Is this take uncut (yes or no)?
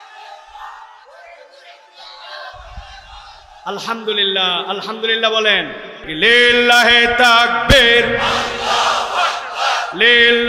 no